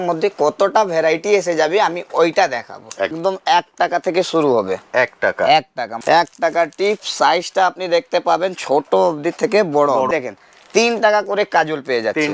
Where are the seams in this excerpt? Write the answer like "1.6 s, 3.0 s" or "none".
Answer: 3.2 s, 5.9 s, 10.1 s